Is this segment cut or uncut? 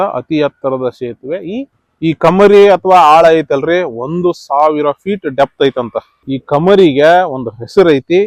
cut